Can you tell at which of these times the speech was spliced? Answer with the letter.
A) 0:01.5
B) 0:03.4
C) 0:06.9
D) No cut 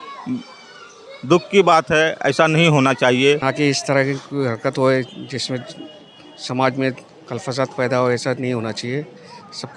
B